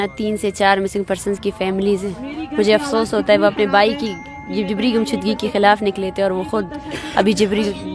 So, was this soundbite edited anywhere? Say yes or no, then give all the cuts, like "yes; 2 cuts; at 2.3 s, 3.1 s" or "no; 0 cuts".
no; 0 cuts